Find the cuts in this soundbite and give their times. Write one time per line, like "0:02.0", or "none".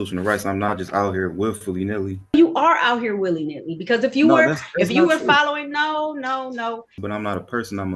0:02.3
0:06.9